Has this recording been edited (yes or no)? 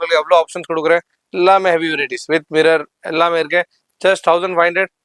yes